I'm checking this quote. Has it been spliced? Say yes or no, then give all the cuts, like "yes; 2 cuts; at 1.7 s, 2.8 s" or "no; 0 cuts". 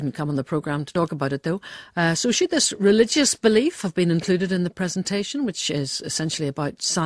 yes; 1 cut; at 2.8 s